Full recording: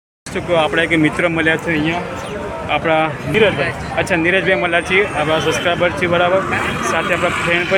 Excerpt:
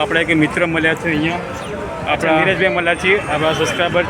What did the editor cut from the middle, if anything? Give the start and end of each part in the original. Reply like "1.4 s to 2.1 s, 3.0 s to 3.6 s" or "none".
3.1 s to 4.3 s